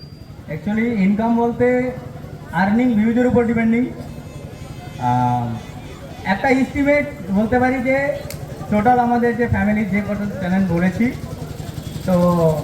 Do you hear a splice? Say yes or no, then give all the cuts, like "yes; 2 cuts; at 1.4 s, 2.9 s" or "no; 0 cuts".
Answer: no; 0 cuts